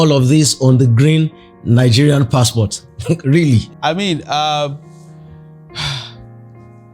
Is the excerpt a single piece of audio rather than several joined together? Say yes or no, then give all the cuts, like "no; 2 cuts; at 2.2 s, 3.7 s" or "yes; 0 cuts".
no; 1 cut; at 3.7 s